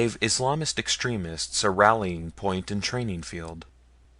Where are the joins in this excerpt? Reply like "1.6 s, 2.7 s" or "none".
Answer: 1.4 s